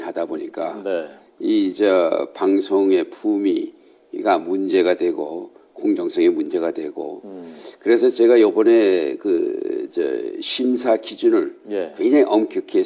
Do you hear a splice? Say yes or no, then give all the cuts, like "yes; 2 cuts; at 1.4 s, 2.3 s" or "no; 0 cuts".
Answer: yes; 1 cut; at 11.2 s